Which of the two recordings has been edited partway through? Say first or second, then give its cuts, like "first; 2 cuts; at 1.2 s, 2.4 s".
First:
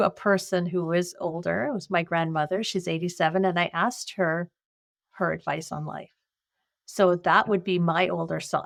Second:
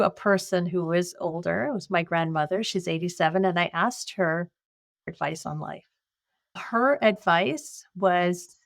second; 2 cuts; at 5.1 s, 6.6 s